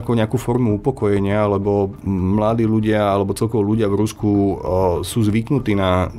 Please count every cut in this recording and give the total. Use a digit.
1